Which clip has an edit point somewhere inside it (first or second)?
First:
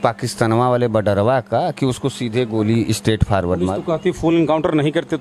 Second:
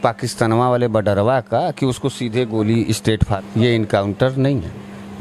second